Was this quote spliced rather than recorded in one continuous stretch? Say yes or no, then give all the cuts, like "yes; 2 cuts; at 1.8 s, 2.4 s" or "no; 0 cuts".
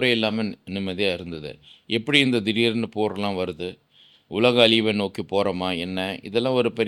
no; 0 cuts